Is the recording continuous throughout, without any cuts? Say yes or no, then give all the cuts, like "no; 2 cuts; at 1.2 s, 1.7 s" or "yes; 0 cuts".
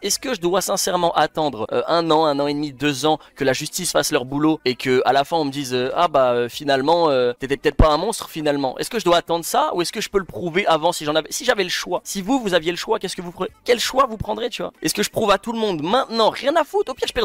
no; 1 cut; at 14.6 s